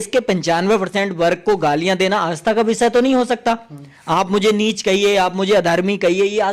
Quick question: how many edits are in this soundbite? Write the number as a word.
zero